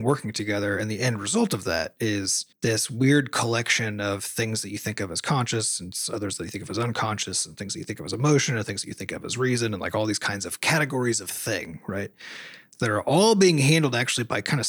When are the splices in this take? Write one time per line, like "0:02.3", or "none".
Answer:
none